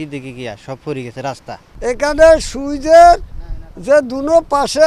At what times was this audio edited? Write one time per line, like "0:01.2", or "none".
0:01.6

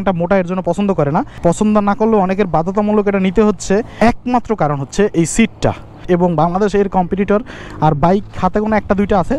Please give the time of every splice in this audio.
0:01.3
0:03.9
0:05.9

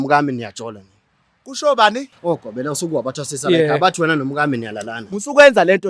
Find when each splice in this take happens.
0:04.9

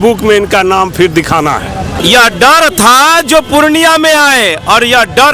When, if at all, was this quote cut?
0:02.0

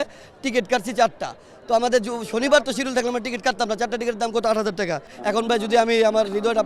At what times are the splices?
0:05.1

